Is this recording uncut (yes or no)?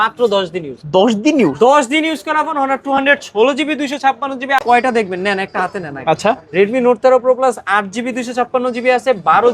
no